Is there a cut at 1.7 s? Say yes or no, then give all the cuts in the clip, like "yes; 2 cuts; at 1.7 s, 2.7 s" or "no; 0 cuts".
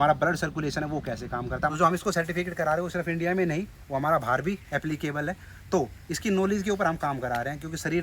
yes; 1 cut; at 1.7 s